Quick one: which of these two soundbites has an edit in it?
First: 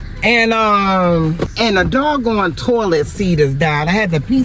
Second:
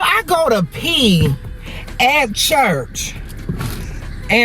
first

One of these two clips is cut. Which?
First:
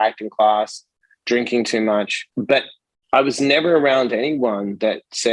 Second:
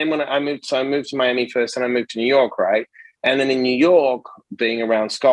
first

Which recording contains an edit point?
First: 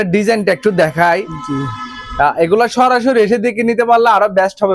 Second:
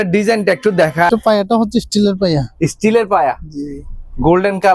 second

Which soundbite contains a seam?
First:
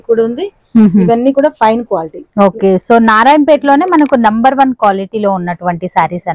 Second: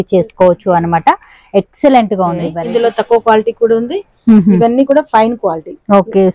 second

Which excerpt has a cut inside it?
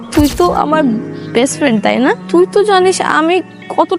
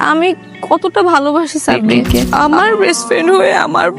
second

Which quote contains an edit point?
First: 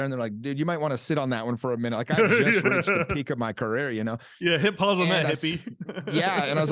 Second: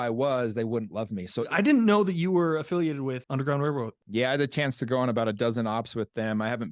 second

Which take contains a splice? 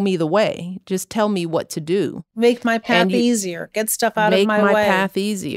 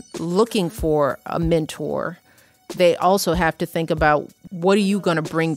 second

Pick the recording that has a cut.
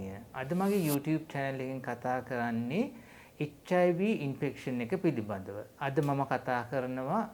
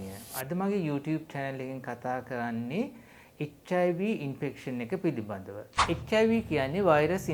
second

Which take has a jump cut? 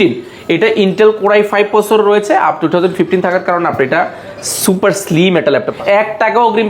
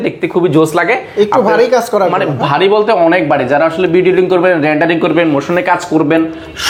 first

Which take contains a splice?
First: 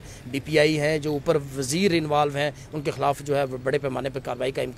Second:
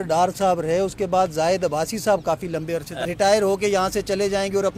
second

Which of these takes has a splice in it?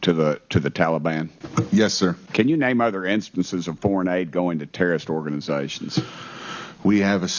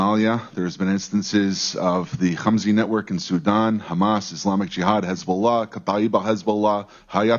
first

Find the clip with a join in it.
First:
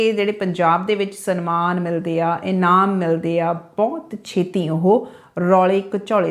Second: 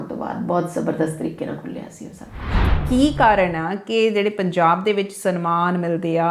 second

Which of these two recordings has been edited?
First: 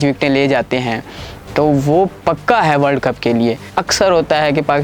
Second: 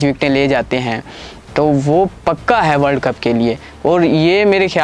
first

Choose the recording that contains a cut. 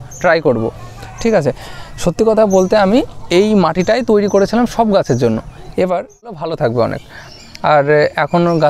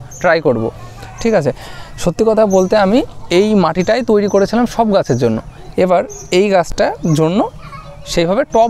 first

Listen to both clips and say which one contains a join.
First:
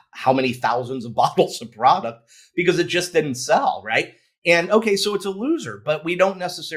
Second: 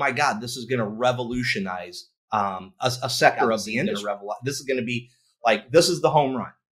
second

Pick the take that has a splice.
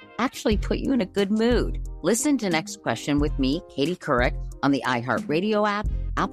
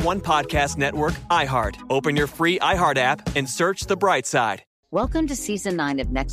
second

